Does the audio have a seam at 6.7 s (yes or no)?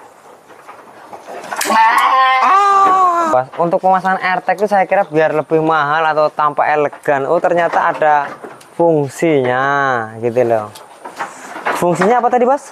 no